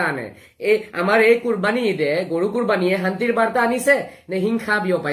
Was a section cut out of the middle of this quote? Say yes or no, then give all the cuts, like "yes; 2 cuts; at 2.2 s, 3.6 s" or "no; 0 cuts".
no; 0 cuts